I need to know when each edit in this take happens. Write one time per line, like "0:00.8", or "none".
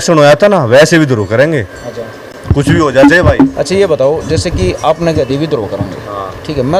none